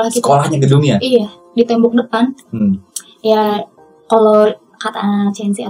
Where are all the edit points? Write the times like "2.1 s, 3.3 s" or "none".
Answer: none